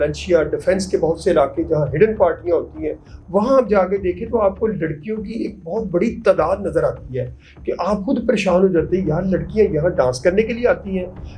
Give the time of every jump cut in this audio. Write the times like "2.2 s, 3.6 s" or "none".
none